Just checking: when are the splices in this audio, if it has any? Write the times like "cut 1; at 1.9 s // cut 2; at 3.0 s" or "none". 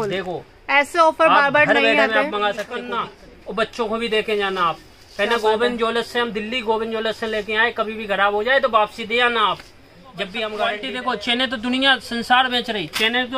cut 1; at 3.0 s // cut 2; at 10.9 s